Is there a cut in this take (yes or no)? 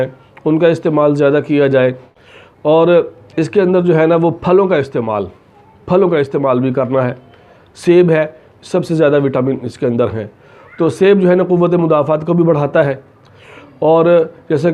no